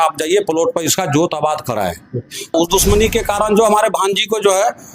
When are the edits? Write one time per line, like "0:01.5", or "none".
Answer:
0:02.5